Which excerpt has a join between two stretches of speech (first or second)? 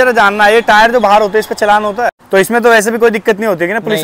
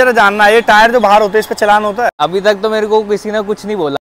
first